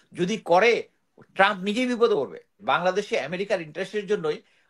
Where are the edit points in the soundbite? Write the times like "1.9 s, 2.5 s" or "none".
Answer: 2.6 s